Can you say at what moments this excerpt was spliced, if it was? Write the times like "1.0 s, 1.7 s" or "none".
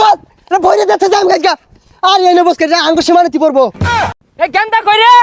4.1 s